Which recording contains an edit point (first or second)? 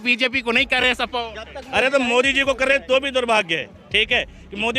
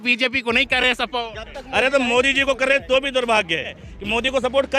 second